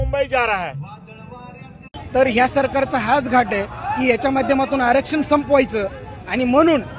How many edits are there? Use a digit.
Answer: 1